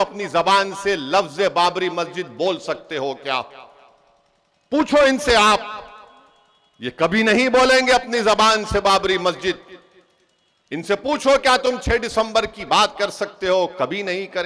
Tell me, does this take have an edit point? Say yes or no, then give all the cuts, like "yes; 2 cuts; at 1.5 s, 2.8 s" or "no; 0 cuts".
no; 0 cuts